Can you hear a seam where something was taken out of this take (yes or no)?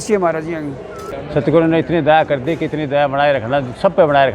yes